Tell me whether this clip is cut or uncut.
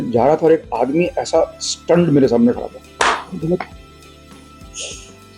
uncut